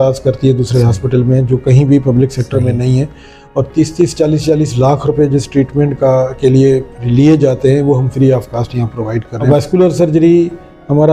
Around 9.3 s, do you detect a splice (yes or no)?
yes